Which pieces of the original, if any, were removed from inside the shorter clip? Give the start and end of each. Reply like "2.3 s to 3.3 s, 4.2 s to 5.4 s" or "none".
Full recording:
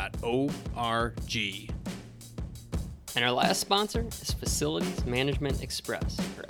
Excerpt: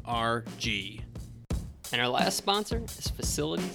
1.7 s to 2.2 s